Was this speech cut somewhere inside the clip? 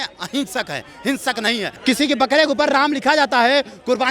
yes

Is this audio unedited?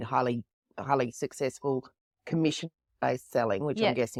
yes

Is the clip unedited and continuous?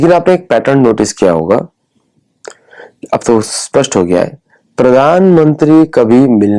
yes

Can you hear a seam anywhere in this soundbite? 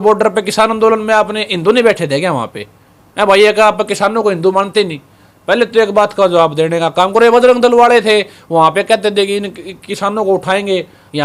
no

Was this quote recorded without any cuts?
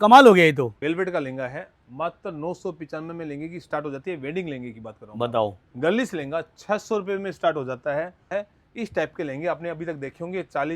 no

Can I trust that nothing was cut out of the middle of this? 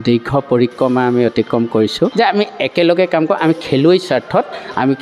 no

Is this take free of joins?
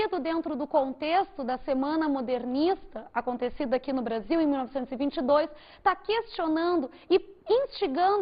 yes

